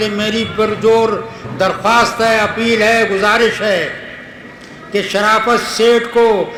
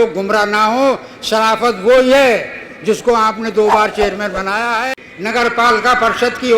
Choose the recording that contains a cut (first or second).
second